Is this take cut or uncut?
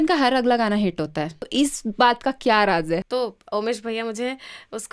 cut